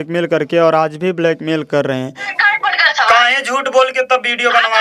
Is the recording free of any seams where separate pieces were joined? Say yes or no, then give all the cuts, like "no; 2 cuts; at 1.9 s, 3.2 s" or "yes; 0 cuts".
no; 1 cut; at 2.3 s